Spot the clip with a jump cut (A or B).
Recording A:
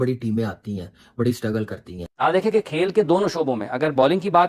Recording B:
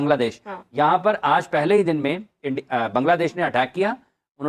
A